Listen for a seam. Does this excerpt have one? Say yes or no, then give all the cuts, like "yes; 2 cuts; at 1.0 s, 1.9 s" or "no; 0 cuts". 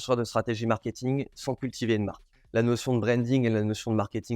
yes; 1 cut; at 2.4 s